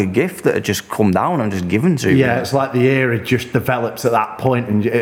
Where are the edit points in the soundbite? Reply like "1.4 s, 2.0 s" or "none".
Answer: none